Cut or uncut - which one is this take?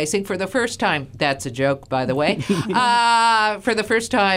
uncut